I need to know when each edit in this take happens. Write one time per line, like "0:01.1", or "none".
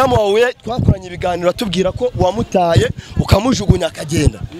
none